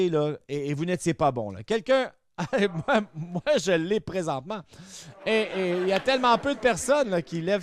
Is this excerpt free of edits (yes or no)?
yes